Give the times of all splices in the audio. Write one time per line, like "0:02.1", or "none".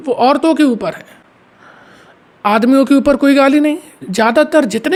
none